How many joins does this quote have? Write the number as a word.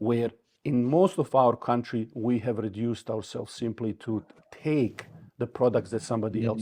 zero